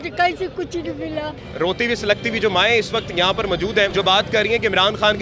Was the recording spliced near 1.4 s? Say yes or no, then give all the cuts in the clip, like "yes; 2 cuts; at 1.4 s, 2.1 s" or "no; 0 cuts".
yes; 2 cuts; at 1.4 s, 3.9 s